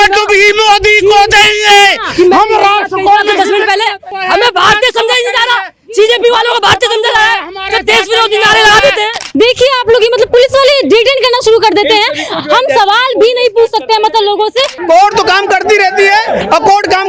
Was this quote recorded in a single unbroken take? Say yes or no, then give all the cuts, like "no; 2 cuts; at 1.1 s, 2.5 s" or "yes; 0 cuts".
no; 3 cuts; at 4.1 s, 9.2 s, 14.8 s